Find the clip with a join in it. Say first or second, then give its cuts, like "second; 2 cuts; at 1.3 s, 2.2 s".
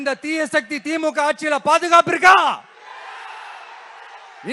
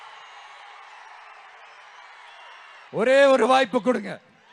second; 1 cut; at 2.9 s